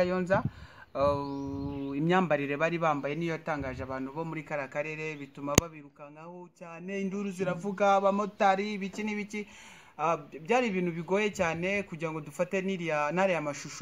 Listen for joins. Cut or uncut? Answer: uncut